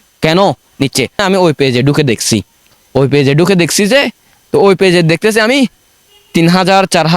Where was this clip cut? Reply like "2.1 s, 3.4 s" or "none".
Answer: 1.2 s